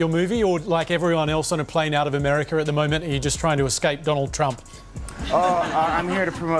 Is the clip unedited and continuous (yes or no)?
yes